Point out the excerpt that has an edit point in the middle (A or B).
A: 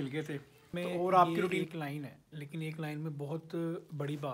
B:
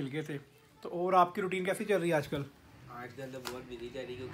A